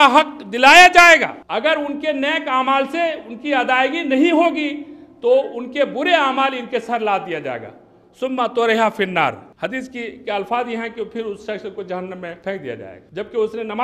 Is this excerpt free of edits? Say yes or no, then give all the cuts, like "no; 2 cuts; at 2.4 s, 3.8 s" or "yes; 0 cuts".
no; 3 cuts; at 1.4 s, 9.5 s, 12.5 s